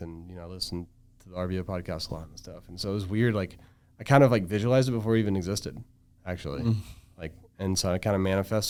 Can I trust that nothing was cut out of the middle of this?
yes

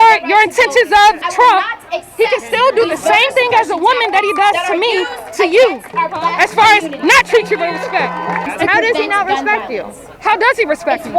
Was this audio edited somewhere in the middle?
no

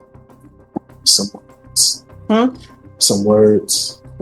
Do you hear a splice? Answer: no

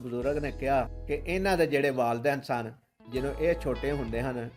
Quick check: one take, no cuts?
no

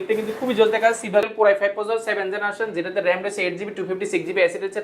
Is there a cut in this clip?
yes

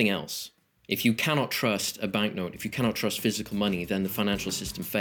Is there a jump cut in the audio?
no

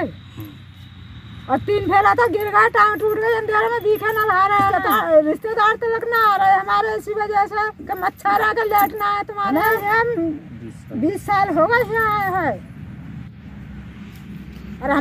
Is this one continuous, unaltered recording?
no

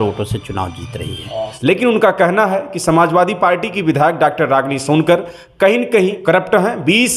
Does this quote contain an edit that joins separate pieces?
yes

